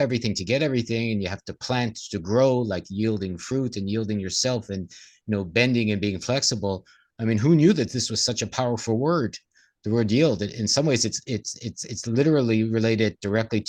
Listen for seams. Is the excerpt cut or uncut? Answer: uncut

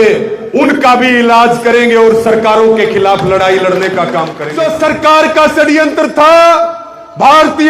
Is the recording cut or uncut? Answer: cut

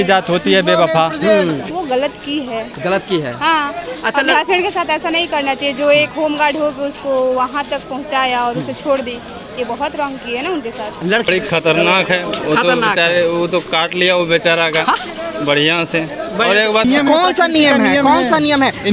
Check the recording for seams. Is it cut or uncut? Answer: cut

